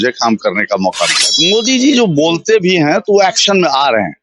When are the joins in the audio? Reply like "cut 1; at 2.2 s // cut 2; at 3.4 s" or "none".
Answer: cut 1; at 1.3 s